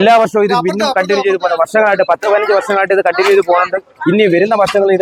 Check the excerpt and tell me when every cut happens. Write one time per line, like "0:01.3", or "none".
none